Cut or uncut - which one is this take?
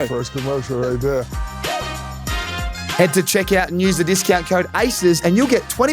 cut